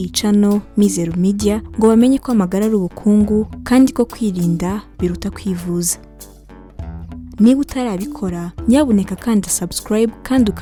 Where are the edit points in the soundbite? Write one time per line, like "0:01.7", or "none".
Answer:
none